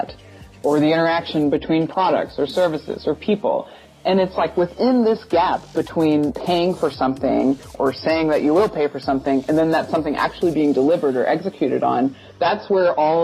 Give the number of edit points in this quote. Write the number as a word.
two